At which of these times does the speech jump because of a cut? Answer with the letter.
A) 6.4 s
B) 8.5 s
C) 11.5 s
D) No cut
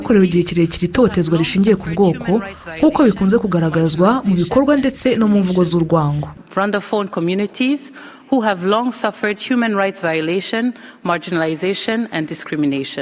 A